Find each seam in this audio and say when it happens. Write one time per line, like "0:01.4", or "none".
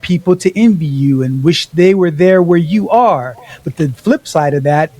none